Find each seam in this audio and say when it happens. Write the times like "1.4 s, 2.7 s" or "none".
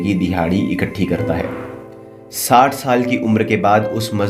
none